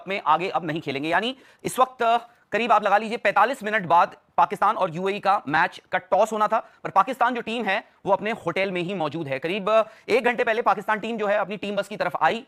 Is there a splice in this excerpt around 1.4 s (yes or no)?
no